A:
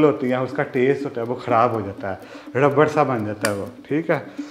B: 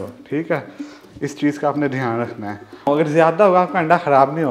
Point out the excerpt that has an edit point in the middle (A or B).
B